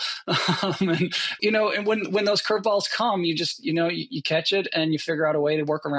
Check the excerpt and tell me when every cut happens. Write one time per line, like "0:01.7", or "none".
0:01.4